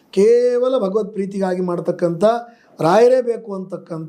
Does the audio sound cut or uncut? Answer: uncut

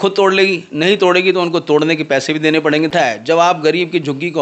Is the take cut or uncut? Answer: cut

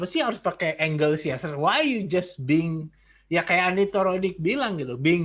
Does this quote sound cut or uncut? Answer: uncut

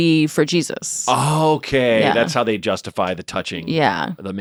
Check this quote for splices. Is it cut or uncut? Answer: uncut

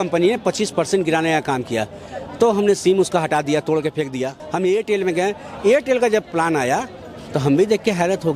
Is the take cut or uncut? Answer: cut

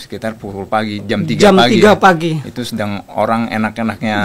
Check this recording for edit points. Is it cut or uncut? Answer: uncut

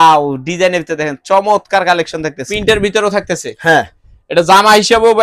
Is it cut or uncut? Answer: cut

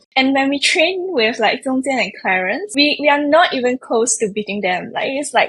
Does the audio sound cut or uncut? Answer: cut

